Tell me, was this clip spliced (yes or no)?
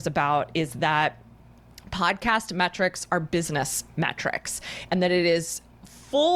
no